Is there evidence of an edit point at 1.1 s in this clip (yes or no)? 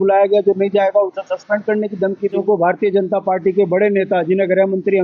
no